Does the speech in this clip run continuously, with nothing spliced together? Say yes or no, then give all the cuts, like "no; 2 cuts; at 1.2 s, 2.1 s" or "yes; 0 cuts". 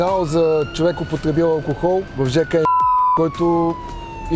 yes; 0 cuts